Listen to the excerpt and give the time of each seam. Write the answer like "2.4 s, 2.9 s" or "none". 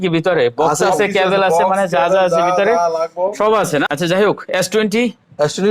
3.9 s